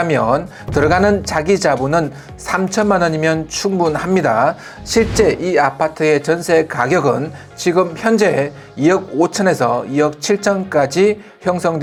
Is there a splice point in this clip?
no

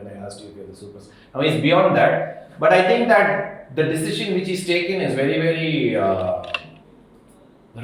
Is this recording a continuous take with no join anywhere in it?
yes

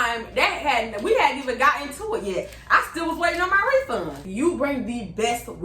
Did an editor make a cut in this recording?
yes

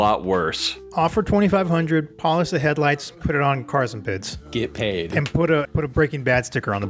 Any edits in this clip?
yes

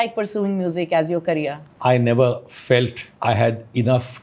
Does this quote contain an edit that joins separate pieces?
yes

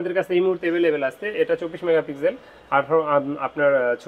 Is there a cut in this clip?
no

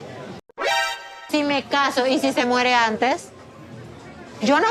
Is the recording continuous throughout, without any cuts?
no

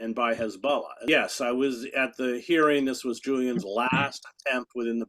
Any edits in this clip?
yes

